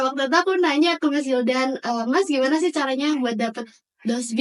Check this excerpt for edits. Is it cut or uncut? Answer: uncut